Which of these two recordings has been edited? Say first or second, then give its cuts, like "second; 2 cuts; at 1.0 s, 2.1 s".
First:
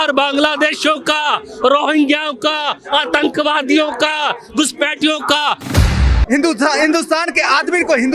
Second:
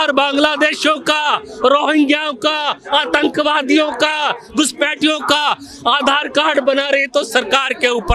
first; 1 cut; at 6.1 s